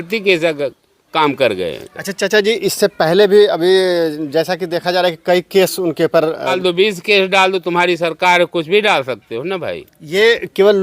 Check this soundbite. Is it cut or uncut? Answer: cut